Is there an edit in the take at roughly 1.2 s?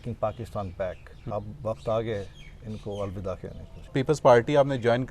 yes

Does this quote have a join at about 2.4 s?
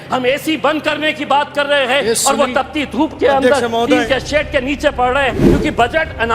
no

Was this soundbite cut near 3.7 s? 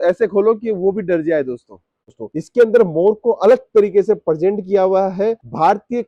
no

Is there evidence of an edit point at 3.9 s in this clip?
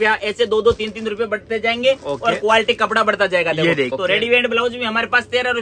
yes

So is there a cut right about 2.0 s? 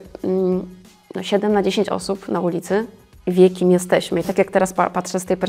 no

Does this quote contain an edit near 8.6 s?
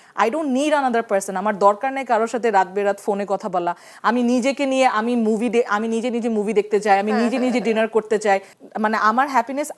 yes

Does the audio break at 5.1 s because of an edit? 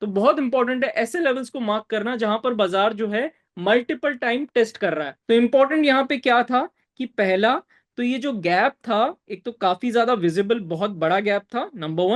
yes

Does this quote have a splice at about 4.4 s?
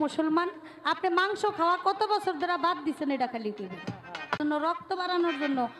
yes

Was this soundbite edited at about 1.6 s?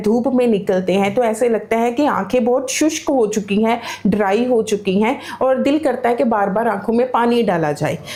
no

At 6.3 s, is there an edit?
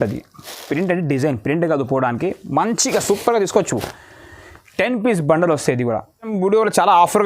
yes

